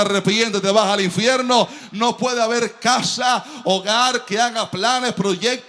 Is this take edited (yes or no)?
yes